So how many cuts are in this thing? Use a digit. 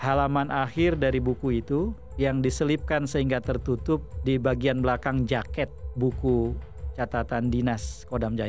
0